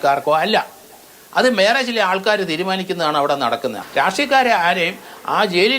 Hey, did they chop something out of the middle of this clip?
yes; 1 cut; at 3.8 s

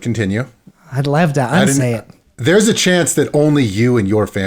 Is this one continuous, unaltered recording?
no; 1 cut; at 2.3 s

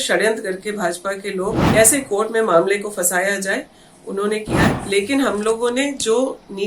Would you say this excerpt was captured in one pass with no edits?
no; 2 cuts; at 1.6 s, 4.7 s

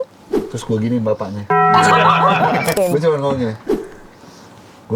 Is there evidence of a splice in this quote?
yes; 1 cut; at 2.8 s

